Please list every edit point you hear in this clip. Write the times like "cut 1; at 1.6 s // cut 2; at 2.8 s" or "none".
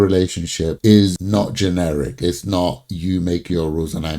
cut 1; at 1.2 s